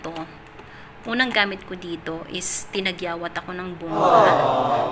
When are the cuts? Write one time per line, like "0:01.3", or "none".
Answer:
0:03.9